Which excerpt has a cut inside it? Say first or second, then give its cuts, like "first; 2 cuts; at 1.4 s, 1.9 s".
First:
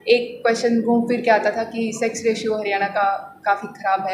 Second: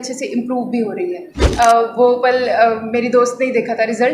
second; 1 cut; at 1.4 s